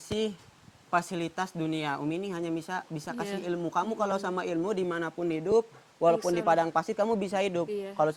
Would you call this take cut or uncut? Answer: uncut